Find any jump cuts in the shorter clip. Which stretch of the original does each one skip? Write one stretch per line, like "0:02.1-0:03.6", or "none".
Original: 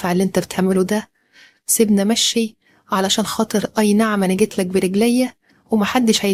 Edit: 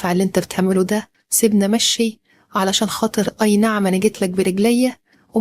0:01.2-0:01.6